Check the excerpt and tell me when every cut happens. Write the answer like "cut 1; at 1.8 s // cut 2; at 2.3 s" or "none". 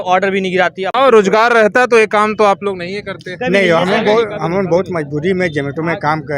cut 1; at 1.0 s